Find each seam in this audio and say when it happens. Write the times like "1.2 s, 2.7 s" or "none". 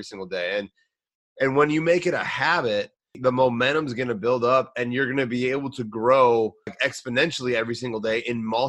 3.2 s, 6.7 s